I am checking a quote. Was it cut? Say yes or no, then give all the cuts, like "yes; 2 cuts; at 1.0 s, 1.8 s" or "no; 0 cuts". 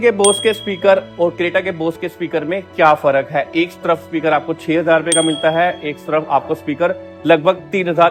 no; 0 cuts